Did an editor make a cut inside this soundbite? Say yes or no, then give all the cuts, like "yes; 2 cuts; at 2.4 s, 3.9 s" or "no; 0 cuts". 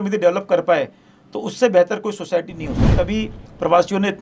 yes; 1 cut; at 3.0 s